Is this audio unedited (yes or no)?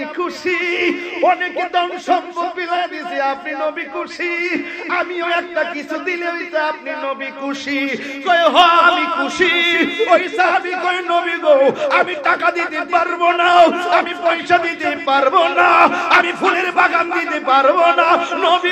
yes